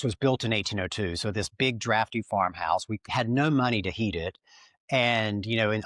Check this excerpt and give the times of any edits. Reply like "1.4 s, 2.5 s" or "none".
3.0 s